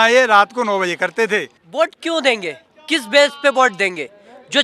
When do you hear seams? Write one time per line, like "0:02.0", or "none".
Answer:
0:01.6